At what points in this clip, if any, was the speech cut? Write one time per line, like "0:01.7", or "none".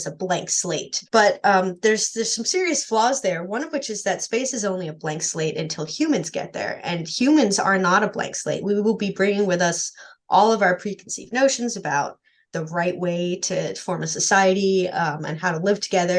0:01.0